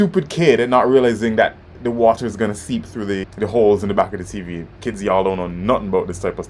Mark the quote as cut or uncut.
cut